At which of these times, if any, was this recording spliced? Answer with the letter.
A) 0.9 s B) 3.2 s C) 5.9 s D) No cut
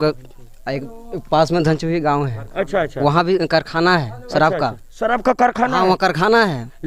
D